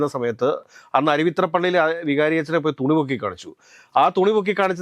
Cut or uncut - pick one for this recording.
uncut